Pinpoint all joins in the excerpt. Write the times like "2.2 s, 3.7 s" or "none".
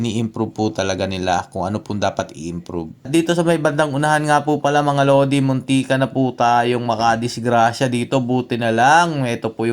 3.1 s